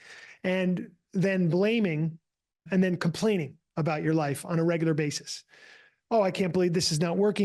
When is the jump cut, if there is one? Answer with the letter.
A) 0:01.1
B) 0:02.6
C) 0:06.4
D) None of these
B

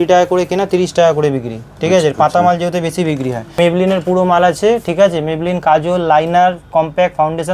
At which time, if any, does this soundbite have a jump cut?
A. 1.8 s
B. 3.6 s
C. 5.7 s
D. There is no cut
B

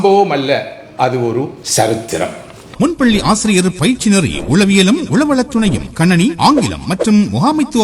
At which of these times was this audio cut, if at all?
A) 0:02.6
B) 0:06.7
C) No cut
A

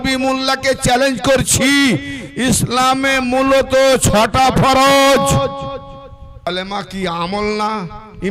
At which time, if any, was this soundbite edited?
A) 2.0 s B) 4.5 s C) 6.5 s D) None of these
C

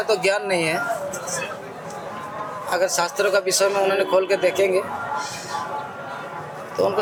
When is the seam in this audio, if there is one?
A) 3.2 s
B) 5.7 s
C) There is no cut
C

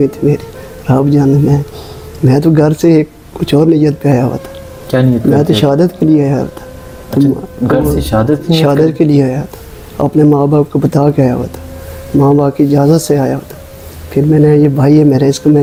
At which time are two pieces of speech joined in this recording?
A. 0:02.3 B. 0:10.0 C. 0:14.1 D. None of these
D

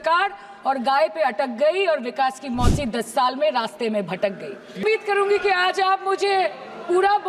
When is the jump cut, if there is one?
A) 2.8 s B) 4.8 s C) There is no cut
B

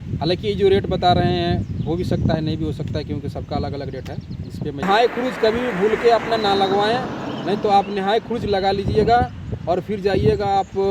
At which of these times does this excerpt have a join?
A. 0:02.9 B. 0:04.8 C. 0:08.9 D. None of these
B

